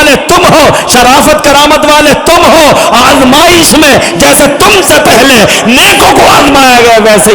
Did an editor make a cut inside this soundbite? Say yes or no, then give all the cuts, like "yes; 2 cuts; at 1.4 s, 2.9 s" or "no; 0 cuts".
no; 0 cuts